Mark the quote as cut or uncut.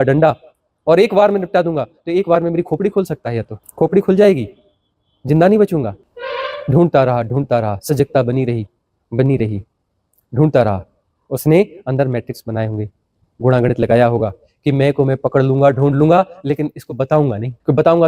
uncut